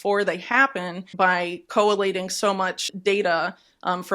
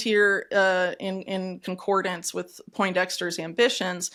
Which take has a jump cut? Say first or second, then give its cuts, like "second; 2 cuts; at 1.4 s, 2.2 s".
first; 2 cuts; at 1.1 s, 2.8 s